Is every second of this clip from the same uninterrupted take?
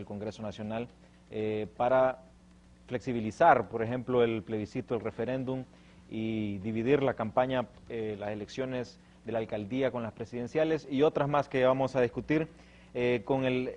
no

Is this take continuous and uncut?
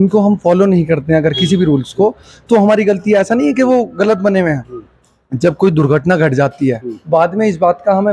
yes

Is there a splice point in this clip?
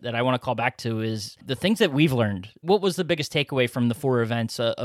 yes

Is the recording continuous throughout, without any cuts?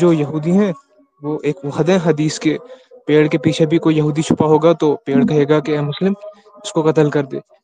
yes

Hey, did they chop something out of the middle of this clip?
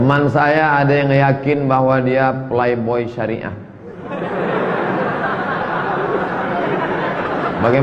no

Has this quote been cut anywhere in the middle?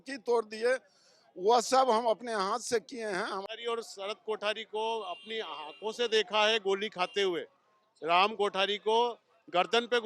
yes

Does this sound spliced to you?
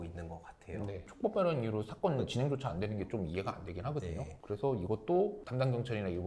yes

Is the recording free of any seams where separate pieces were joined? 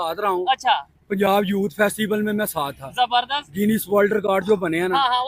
yes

